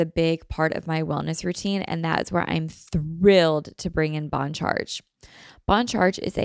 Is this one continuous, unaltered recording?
yes; 0 cuts

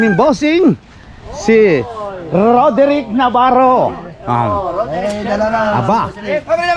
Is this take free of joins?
yes; 0 cuts

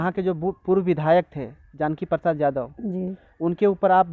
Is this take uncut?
yes; 0 cuts

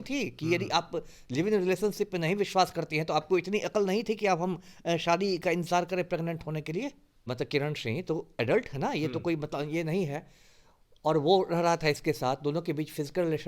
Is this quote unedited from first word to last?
no; 1 cut; at 7.3 s

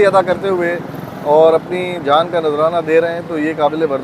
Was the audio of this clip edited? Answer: no; 0 cuts

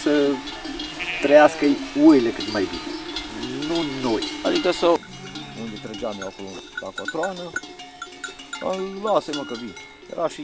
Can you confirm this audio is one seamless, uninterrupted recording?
no; 1 cut; at 5.2 s

